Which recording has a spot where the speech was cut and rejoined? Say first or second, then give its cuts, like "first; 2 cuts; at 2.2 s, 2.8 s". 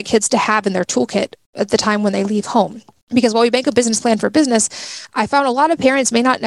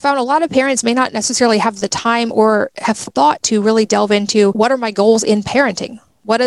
second; 1 cut; at 4.5 s